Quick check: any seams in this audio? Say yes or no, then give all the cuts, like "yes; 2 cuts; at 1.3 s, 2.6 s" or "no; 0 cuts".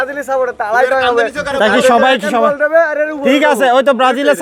no; 0 cuts